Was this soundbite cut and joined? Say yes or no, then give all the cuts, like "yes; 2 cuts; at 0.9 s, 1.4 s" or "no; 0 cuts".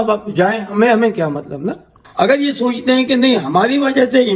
yes; 1 cut; at 2.0 s